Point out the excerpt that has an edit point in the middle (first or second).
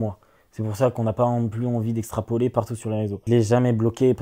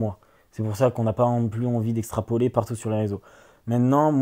first